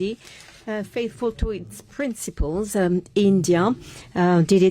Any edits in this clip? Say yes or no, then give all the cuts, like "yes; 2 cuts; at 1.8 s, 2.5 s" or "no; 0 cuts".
no; 0 cuts